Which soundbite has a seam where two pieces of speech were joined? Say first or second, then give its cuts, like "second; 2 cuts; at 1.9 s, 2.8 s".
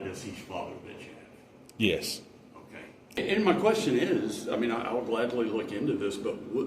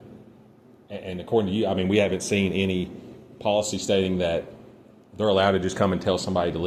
first; 1 cut; at 3.2 s